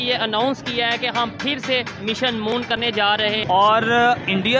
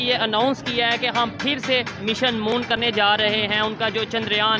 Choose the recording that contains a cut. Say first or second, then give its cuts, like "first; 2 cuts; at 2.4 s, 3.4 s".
first; 1 cut; at 3.4 s